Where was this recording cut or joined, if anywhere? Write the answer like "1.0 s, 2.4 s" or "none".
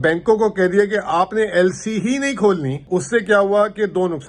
2.9 s